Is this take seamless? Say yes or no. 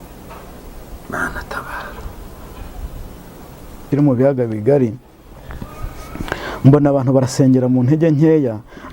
no